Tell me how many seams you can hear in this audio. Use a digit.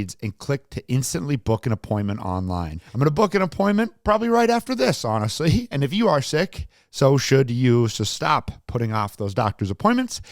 1